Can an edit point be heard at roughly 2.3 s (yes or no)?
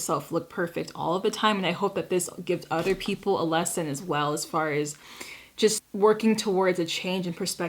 no